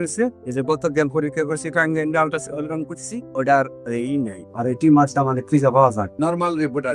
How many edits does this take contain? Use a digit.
0